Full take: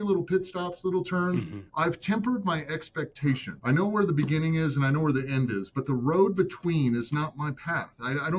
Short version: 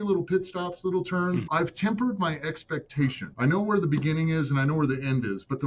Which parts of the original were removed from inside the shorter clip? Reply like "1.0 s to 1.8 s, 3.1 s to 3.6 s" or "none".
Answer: 1.5 s to 1.7 s